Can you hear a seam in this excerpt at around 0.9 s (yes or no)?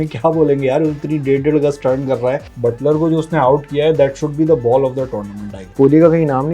no